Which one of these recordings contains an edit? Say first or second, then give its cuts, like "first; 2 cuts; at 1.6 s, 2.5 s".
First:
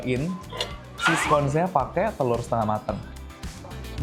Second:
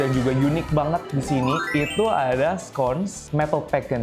second; 1 cut; at 1.6 s